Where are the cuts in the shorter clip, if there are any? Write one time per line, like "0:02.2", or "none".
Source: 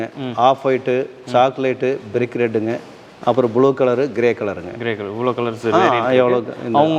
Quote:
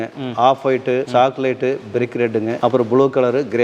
0:01.1
0:02.5